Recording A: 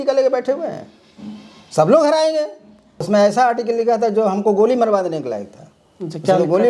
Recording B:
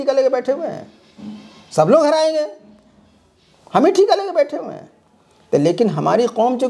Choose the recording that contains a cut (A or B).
A